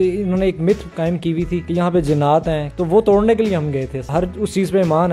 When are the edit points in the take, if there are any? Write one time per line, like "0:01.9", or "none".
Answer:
0:01.6
0:02.7
0:04.1

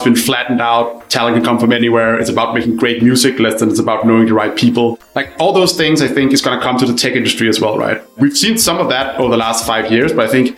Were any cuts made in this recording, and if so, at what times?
0:08.2

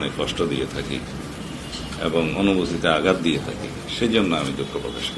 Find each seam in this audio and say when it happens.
none

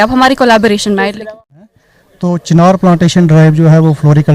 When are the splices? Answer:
0:01.7

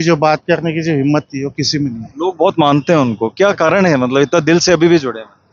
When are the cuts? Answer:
none

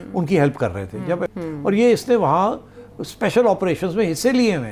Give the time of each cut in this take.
0:01.3

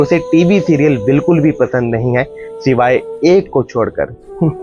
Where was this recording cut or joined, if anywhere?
none

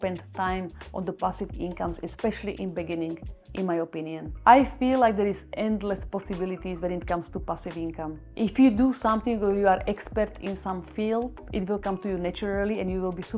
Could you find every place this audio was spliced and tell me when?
0:04.2
0:11.4

